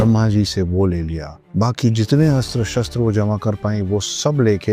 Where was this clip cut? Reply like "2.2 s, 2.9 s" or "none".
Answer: none